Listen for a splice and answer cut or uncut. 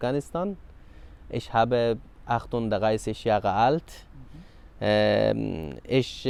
uncut